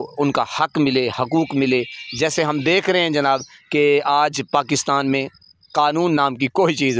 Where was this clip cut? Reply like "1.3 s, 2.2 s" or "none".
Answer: none